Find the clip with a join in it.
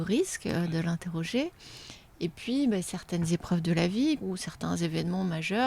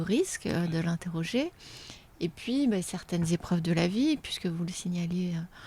first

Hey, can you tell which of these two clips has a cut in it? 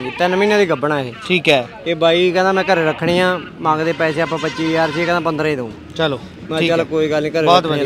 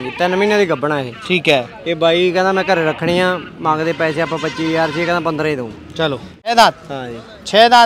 second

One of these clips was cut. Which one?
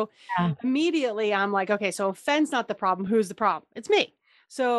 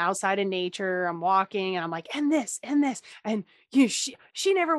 second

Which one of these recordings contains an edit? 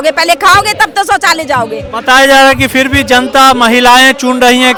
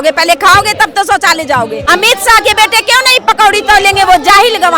second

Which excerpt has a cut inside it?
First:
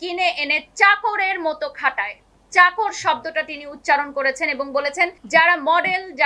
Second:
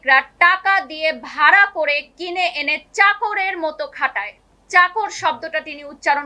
first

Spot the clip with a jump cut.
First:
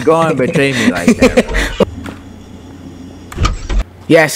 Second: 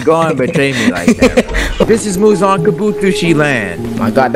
second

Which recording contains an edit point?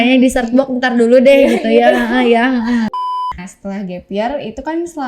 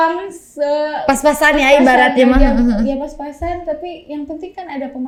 first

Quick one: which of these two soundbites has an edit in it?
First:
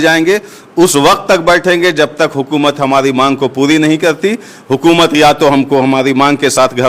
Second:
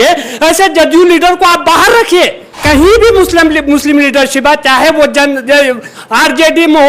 second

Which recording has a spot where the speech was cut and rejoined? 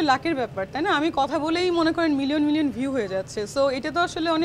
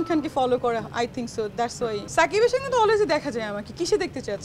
second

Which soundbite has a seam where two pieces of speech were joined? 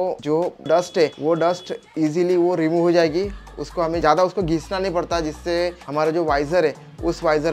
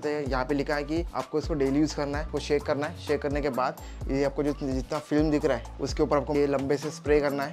second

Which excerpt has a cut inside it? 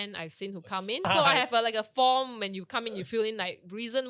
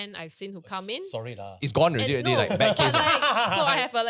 first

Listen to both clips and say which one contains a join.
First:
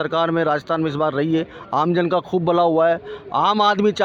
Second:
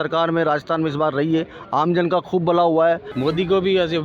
second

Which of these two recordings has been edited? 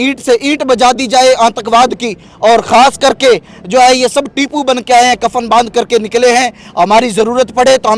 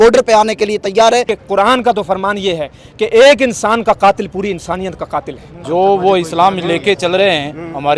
second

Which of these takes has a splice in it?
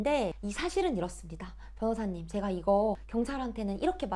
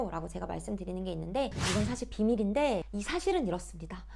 second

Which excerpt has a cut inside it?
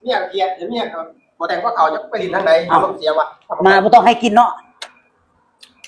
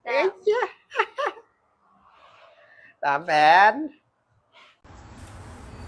second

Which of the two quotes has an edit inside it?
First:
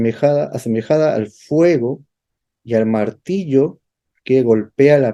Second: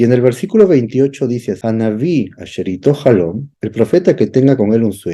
second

